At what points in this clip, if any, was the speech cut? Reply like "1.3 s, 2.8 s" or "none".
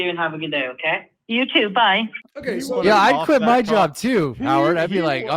2.2 s